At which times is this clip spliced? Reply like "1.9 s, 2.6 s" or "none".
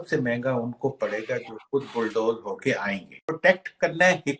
3.3 s